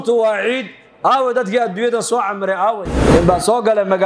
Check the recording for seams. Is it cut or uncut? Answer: cut